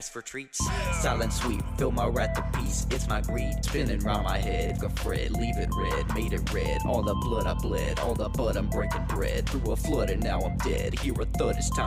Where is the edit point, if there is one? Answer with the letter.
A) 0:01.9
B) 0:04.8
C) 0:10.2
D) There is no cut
B